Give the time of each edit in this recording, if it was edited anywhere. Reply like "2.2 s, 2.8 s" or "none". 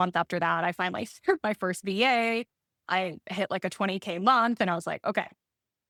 none